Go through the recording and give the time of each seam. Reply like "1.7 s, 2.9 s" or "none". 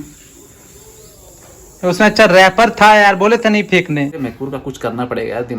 4.2 s